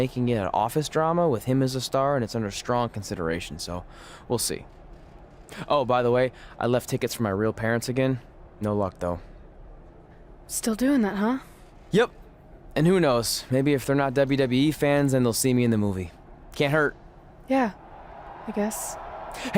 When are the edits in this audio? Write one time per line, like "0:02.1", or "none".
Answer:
none